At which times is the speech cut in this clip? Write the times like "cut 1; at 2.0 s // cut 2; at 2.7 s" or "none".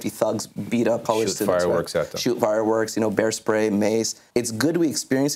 cut 1; at 1.0 s // cut 2; at 4.2 s